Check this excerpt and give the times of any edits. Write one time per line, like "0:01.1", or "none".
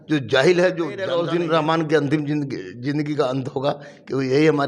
0:01.0